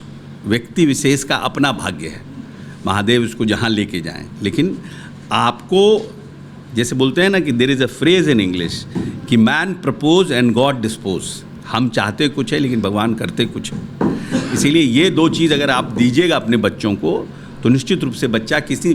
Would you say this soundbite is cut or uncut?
uncut